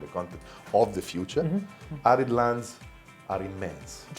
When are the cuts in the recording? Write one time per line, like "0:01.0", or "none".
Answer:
0:01.8

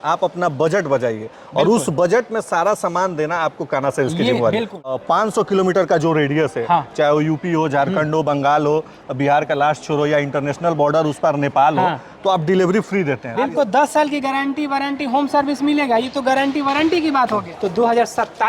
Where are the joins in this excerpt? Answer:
0:04.9
0:13.3
0:17.5

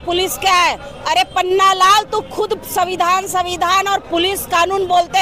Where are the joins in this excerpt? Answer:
none

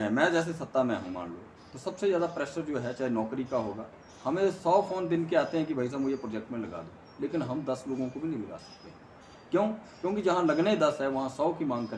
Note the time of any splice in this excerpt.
none

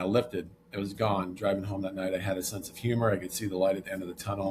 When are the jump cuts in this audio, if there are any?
none

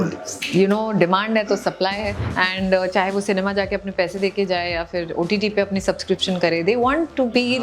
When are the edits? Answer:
0:02.2

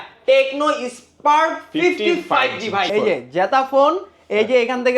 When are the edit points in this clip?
0:02.9

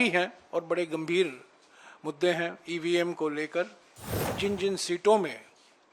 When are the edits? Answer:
0:04.3

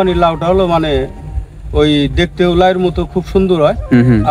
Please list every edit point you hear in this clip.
none

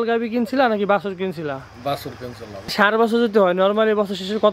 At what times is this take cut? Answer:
0:02.7

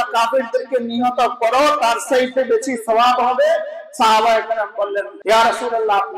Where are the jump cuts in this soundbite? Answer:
0:05.1

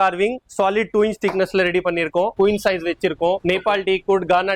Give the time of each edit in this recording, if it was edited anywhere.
0:02.3
0:03.4

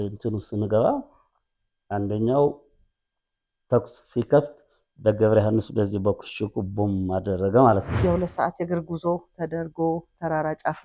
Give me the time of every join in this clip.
0:07.9

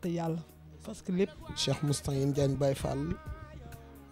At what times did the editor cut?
0:01.3

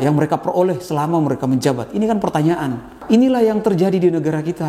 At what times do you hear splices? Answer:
0:03.0

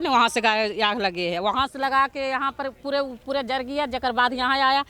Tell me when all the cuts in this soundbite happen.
none

